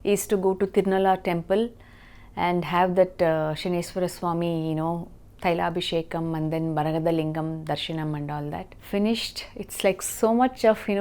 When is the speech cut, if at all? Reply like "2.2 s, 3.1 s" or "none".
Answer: none